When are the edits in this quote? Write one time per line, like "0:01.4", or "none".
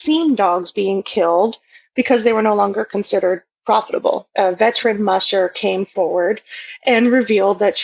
0:04.3